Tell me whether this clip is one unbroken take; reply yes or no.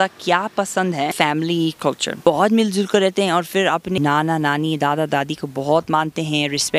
no